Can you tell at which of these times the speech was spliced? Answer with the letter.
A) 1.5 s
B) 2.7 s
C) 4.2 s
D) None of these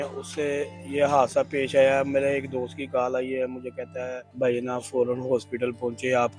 C